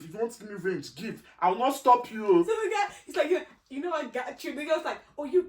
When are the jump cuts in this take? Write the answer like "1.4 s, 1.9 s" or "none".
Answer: 2.5 s